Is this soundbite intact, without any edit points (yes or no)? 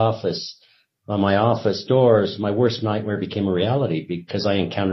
yes